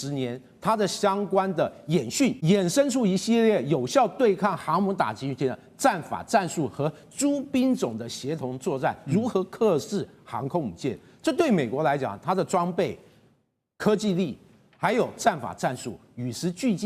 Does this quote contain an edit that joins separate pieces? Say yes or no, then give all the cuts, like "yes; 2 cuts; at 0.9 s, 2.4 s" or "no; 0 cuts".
yes; 1 cut; at 2.4 s